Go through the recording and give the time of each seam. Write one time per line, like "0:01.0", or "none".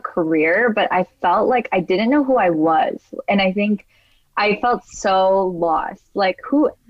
none